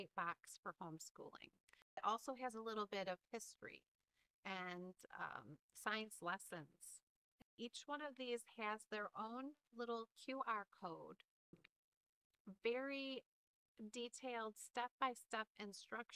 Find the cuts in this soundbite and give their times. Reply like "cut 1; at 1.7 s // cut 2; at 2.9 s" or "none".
cut 1; at 2.0 s // cut 2; at 7.5 s // cut 3; at 11.4 s

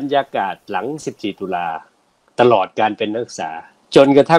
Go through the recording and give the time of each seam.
none

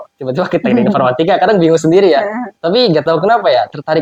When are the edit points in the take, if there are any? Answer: none

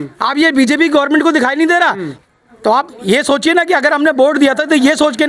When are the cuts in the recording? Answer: cut 1; at 2.2 s

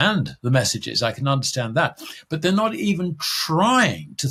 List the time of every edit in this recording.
none

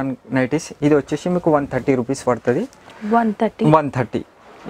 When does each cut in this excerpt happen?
none

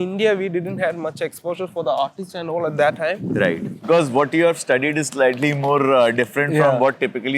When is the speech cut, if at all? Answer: cut 1; at 3.9 s

